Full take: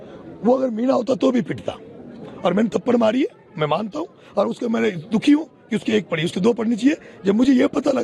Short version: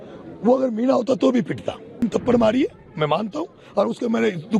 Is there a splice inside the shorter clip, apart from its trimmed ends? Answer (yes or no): yes